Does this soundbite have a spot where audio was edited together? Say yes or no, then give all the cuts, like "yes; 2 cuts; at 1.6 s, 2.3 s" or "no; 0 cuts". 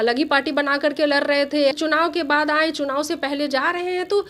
yes; 1 cut; at 1.7 s